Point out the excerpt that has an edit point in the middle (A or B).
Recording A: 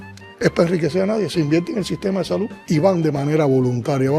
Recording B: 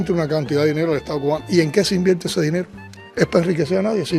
A